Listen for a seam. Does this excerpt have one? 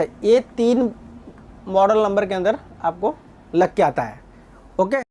no; 0 cuts

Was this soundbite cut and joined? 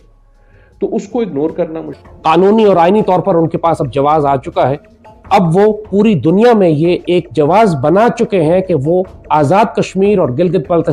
yes; 1 cut; at 2.0 s

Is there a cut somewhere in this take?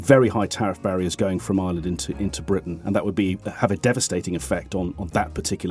no; 0 cuts

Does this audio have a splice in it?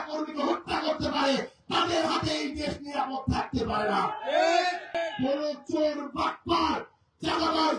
yes; 1 cut; at 5.0 s

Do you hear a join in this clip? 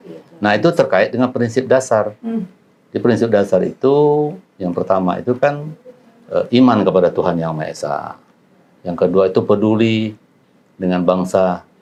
no; 0 cuts

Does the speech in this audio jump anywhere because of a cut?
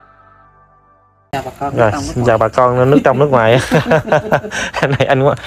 yes; 1 cut; at 1.3 s

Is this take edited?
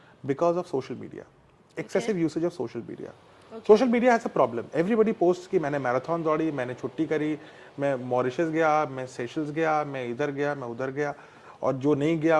no; 0 cuts

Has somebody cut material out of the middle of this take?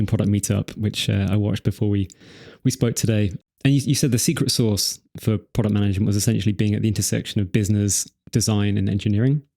yes; 1 cut; at 3.4 s

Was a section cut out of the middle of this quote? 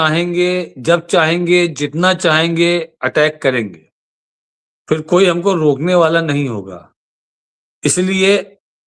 no; 0 cuts

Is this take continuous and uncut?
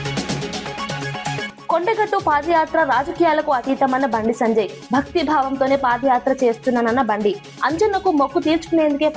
no; 1 cut; at 1.5 s

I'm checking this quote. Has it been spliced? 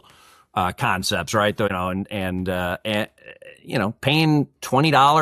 yes; 1 cut; at 1.7 s

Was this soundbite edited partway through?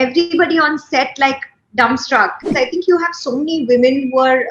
yes; 1 cut; at 2.5 s

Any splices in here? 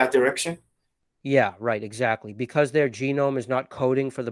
no; 0 cuts

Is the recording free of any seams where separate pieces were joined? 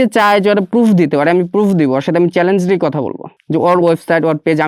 yes; 0 cuts

